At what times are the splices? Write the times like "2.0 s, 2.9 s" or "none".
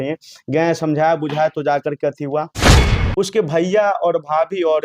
2.8 s